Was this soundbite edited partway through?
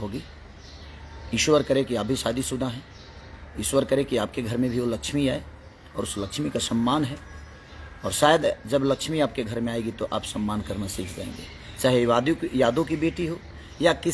no; 0 cuts

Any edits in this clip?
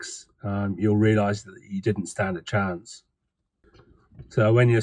yes; 1 cut; at 3.6 s

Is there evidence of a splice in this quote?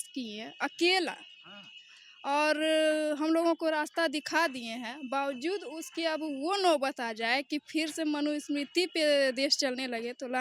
no; 0 cuts

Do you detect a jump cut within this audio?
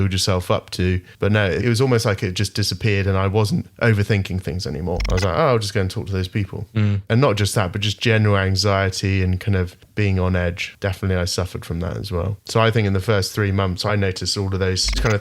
no; 0 cuts

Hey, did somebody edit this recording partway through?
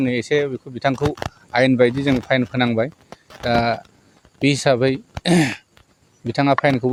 no; 0 cuts

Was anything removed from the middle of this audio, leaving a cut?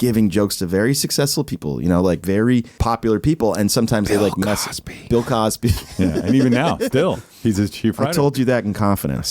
yes; 1 cut; at 2.7 s

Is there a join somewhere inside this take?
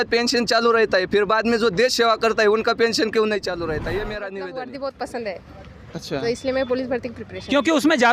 yes; 1 cut; at 4.4 s

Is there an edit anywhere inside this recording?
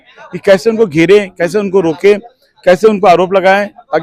no; 0 cuts

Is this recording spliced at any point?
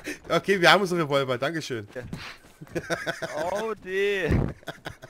yes; 1 cut; at 2.0 s

